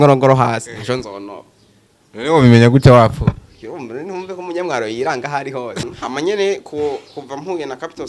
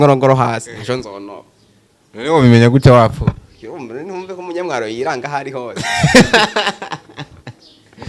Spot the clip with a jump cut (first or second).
first